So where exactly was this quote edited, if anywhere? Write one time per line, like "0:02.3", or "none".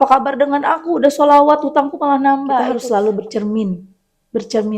0:02.6